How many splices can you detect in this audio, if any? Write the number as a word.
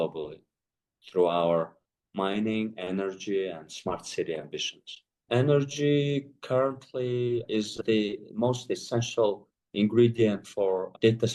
one